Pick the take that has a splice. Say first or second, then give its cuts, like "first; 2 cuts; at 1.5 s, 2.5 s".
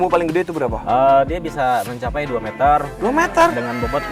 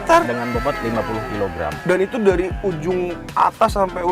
second; 2 cuts; at 1.8 s, 3.2 s